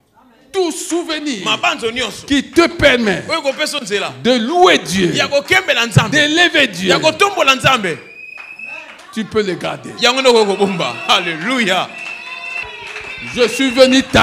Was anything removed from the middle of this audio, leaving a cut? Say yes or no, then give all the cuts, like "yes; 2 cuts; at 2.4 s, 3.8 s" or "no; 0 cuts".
yes; 1 cut; at 12.7 s